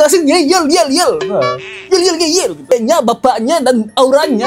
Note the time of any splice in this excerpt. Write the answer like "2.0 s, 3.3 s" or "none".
2.7 s